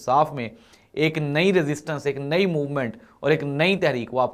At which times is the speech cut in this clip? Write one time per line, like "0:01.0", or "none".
none

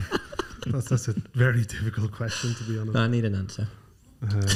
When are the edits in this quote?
none

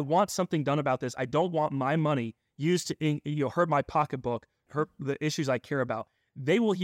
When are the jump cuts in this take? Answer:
none

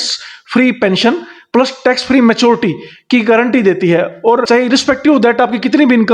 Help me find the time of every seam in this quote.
none

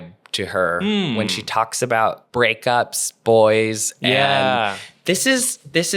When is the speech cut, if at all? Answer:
0:02.2

